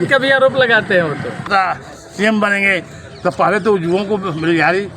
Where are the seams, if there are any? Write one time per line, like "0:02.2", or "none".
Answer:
0:01.4